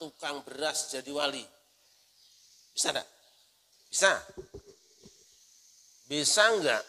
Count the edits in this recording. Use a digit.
1